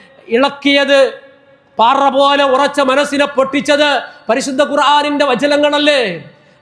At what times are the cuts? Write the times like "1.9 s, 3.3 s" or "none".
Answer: none

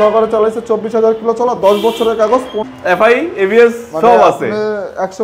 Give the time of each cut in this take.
2.6 s

